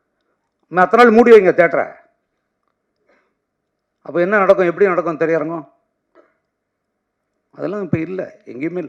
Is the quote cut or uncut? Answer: uncut